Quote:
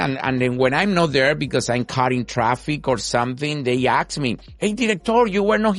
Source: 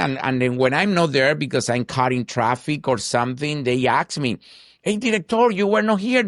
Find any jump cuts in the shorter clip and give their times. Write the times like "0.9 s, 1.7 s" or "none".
4.5 s